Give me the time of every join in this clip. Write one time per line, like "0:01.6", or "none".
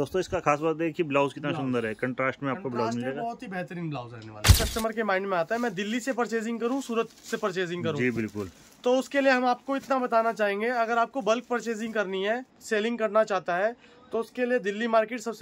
0:04.5
0:12.5